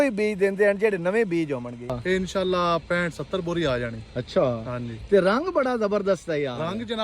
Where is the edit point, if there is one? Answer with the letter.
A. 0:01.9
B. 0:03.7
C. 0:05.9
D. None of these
A